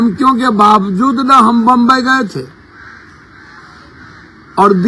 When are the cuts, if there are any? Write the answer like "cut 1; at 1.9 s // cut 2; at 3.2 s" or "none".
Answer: none